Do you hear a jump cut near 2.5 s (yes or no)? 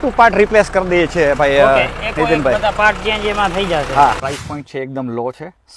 no